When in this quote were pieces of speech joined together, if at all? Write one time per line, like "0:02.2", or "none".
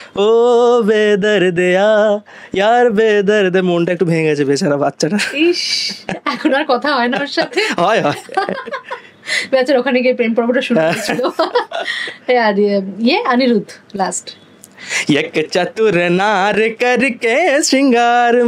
none